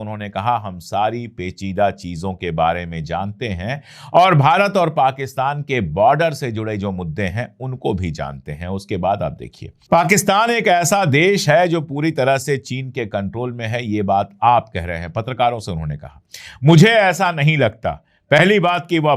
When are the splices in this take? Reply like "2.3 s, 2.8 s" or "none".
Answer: none